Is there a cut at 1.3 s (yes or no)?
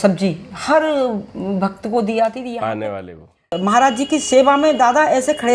no